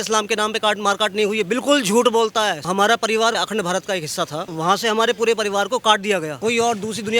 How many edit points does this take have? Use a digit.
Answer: 4